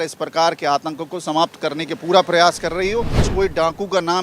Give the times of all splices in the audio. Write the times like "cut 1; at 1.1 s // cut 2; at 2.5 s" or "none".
cut 1; at 3.3 s